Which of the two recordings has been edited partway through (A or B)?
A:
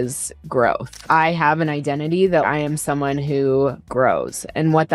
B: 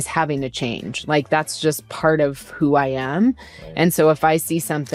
A